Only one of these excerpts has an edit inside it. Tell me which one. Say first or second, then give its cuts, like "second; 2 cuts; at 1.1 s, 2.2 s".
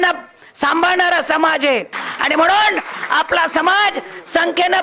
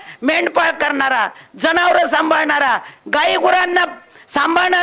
first; 1 cut; at 2.0 s